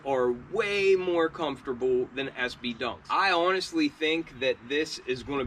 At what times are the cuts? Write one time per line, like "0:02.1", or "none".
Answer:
0:03.0